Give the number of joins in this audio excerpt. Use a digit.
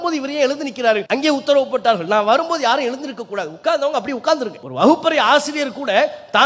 2